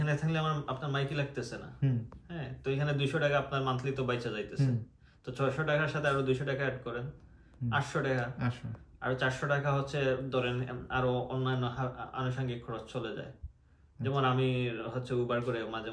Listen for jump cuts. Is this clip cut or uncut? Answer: uncut